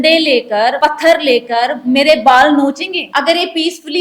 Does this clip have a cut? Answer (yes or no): yes